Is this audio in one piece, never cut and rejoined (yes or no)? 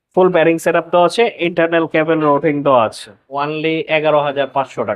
no